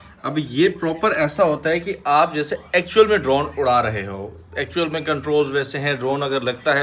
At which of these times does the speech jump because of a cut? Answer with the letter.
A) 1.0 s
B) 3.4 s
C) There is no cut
C